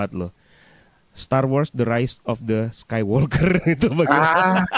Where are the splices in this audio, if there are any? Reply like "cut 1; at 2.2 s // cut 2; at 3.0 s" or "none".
none

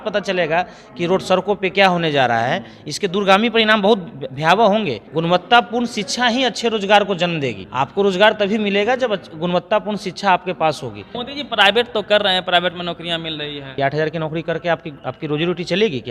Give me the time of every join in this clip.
cut 1; at 5.0 s // cut 2; at 7.6 s // cut 3; at 11.2 s // cut 4; at 13.8 s

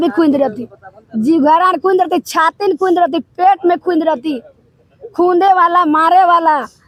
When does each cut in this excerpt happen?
none

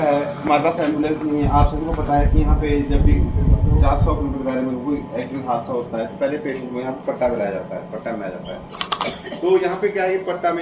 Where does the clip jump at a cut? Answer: none

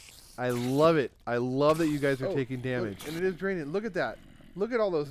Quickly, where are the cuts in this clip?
cut 1; at 3.0 s

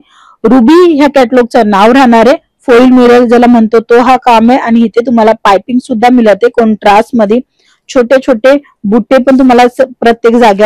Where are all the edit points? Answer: none

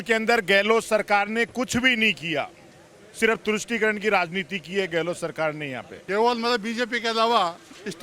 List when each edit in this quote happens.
cut 1; at 5.9 s

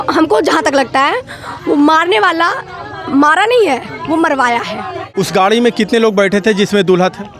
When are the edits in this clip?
cut 1; at 5.1 s

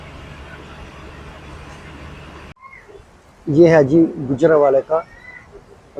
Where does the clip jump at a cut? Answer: cut 1; at 2.6 s

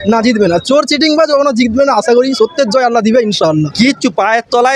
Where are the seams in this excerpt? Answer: cut 1; at 3.7 s

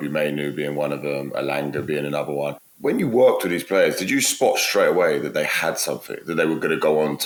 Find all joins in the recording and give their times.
none

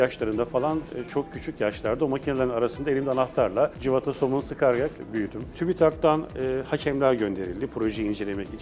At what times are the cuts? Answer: cut 1; at 3.8 s // cut 2; at 5.1 s

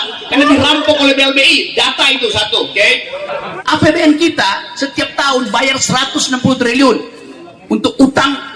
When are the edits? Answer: cut 1; at 3.4 s

